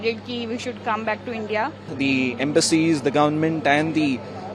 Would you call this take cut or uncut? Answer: cut